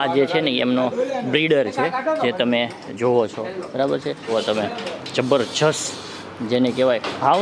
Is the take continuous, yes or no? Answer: no